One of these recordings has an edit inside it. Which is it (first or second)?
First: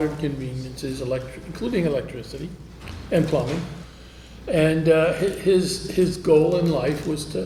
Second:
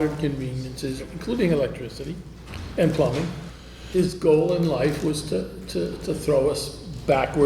second